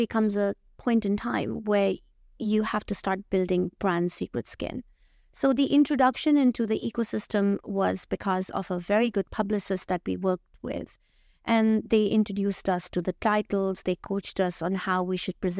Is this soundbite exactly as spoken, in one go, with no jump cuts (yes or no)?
yes